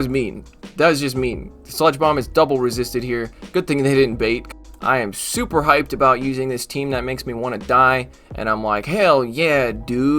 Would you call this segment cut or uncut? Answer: cut